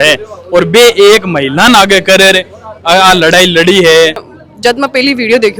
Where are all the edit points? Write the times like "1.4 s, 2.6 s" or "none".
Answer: 4.2 s